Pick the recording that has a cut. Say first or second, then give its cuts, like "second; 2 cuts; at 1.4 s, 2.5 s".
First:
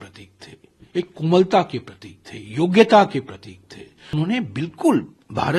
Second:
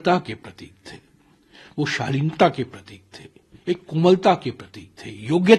first; 1 cut; at 4.1 s